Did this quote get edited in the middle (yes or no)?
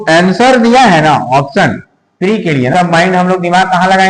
yes